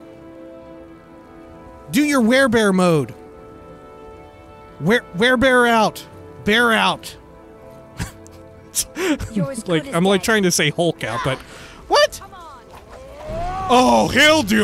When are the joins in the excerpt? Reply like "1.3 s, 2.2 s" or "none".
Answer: none